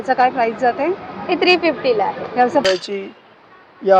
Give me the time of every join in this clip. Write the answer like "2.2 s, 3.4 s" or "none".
2.7 s